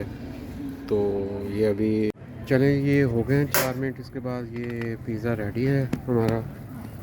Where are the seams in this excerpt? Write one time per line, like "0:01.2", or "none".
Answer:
0:02.1